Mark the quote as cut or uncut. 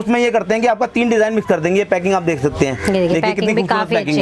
uncut